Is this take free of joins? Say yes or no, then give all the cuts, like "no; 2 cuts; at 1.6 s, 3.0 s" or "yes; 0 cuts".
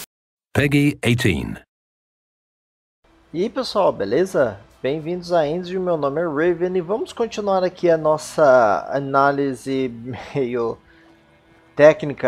yes; 0 cuts